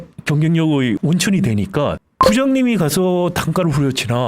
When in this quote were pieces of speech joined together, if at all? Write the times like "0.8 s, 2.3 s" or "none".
1.0 s, 2.1 s